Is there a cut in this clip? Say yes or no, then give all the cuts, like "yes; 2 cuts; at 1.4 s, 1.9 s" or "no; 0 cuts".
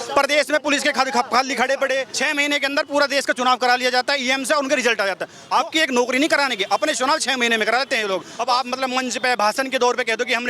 yes; 3 cuts; at 2.1 s, 5.3 s, 8.3 s